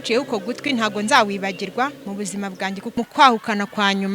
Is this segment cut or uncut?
cut